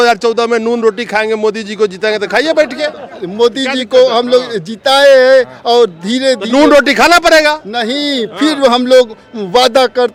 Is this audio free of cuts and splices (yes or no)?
yes